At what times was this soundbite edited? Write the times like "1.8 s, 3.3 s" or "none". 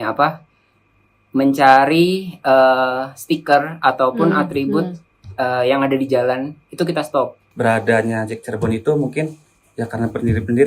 7.4 s